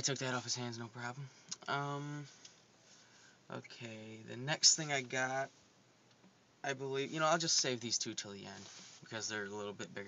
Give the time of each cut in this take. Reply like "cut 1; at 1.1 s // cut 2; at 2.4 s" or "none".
cut 1; at 1.3 s

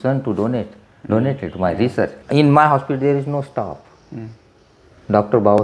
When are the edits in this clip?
cut 1; at 2.2 s

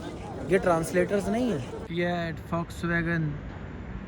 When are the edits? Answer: cut 1; at 1.9 s

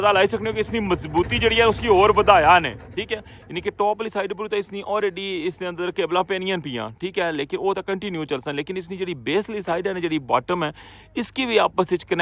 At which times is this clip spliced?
none

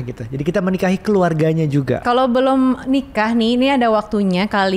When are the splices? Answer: cut 1; at 2.0 s

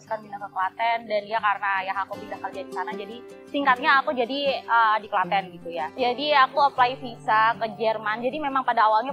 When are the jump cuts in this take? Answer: cut 1; at 5.9 s

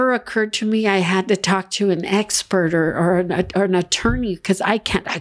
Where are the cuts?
none

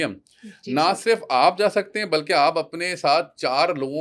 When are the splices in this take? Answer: none

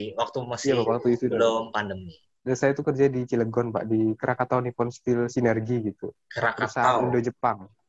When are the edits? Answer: cut 1; at 2.4 s

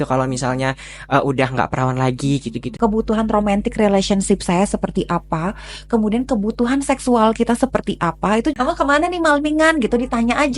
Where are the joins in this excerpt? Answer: cut 1; at 2.7 s // cut 2; at 8.6 s

